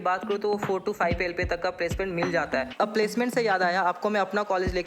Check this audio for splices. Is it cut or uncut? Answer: cut